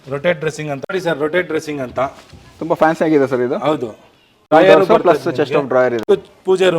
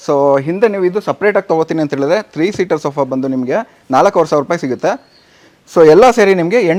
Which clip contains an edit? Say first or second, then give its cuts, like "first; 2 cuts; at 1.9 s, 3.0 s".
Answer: first; 3 cuts; at 0.9 s, 4.3 s, 6.0 s